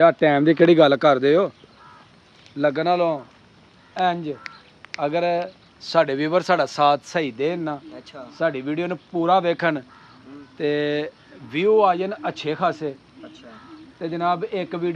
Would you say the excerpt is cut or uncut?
uncut